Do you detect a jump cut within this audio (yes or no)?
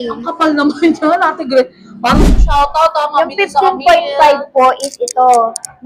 yes